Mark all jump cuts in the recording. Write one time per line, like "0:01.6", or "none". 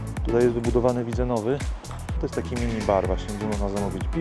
0:02.2

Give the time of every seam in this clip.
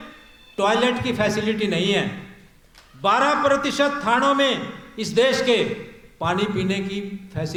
none

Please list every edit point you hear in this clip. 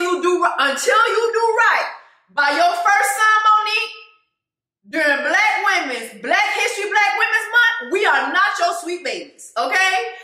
none

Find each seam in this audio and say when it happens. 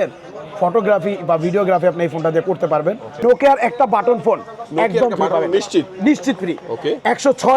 0:03.2

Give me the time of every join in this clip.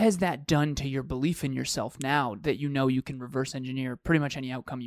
none

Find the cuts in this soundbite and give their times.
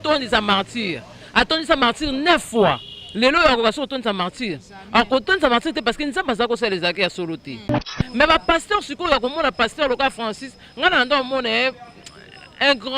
0:07.9

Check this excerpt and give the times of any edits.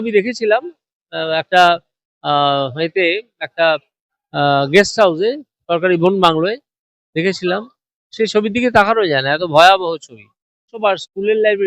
0:10.7

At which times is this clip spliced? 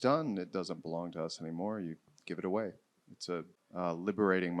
0:03.6

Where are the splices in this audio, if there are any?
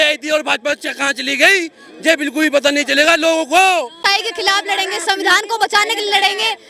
0:04.0

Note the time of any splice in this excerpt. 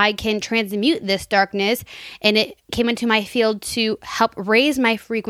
0:02.7

